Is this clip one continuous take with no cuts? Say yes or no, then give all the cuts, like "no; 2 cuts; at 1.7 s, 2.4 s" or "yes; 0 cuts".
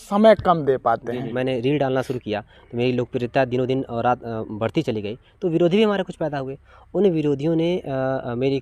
no; 1 cut; at 1.3 s